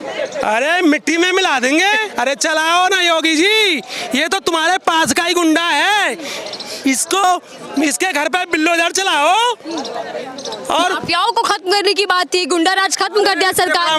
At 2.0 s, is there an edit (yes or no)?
no